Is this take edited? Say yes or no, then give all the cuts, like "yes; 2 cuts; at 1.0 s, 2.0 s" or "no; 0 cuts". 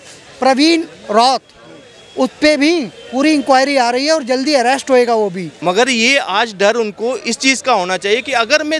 yes; 1 cut; at 5.5 s